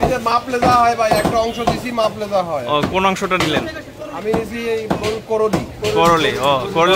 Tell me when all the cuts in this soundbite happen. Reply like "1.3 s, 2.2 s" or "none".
none